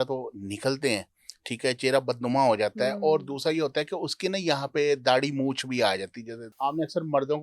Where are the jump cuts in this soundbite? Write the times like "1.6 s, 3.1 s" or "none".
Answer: 6.5 s